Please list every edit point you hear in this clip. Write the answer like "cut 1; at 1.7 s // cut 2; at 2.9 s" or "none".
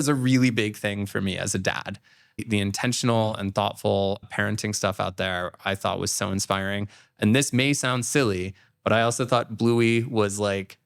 cut 1; at 2.4 s // cut 2; at 4.2 s